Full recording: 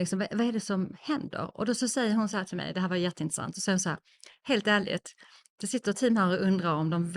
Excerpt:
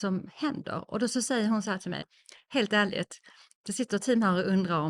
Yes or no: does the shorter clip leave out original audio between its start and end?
yes